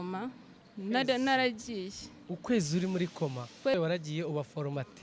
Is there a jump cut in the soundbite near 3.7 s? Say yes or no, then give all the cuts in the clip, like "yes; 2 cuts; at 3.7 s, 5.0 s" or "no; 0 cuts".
yes; 1 cut; at 3.7 s